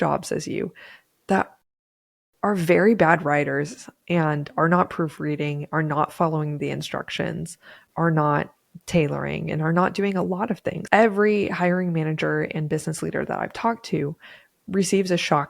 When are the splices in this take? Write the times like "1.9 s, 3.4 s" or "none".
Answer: 10.7 s